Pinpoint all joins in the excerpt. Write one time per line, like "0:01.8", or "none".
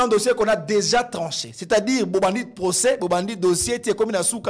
none